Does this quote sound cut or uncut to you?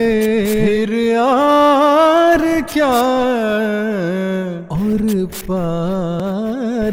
uncut